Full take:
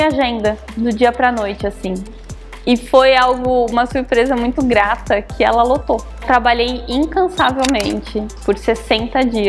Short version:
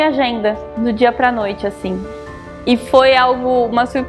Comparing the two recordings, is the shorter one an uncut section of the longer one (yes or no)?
yes